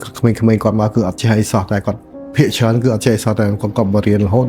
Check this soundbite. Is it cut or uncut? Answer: uncut